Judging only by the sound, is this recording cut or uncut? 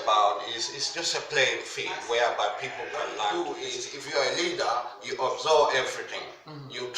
cut